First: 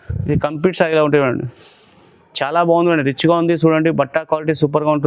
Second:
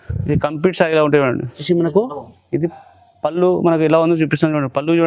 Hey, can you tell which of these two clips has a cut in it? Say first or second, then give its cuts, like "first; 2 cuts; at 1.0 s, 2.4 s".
second; 1 cut; at 1.6 s